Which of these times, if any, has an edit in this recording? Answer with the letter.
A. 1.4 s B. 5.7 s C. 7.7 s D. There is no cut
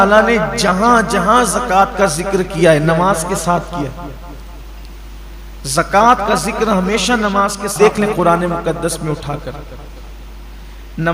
C